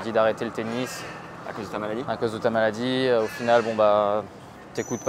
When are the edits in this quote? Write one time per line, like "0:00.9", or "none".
none